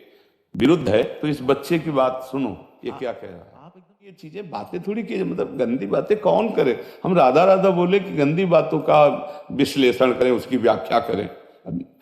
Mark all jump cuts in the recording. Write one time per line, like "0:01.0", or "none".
0:04.4